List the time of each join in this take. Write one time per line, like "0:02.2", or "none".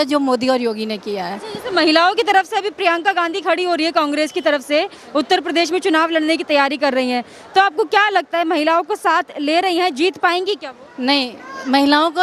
none